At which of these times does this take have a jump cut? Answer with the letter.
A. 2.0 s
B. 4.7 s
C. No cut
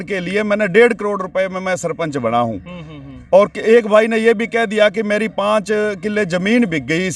C